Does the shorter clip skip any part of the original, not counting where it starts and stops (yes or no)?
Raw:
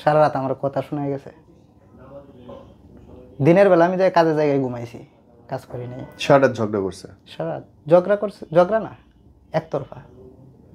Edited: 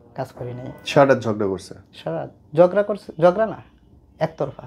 no